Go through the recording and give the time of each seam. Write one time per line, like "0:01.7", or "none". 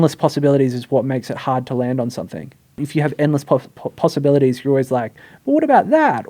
0:02.8